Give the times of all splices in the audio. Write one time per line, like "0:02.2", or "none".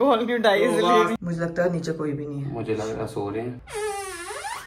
0:01.2
0:03.6

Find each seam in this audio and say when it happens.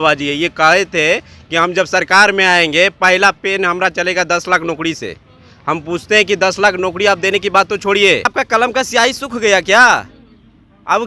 0:08.3

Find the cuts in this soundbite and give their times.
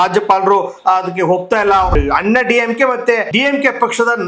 0:01.9
0:03.3

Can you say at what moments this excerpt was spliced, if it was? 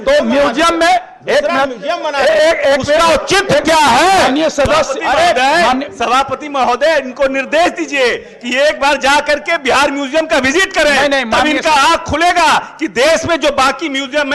none

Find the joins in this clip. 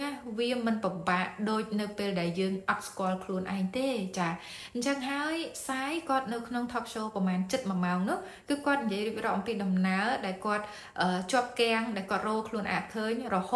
none

